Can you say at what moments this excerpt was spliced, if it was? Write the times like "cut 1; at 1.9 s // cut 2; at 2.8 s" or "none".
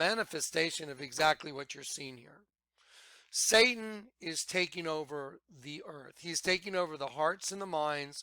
cut 1; at 1.0 s